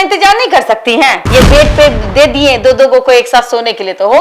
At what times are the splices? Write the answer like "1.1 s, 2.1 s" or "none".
1.2 s